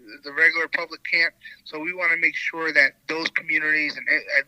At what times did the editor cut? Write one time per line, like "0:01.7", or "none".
0:03.0